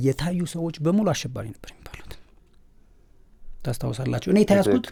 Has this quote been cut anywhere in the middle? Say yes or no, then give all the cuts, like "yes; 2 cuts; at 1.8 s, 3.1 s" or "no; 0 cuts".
no; 0 cuts